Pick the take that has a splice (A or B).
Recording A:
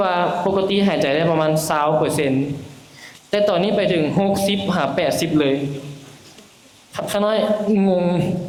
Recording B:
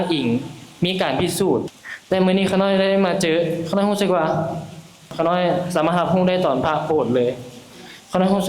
B